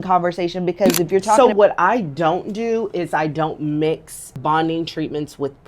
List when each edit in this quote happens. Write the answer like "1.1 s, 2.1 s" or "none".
1.4 s, 4.4 s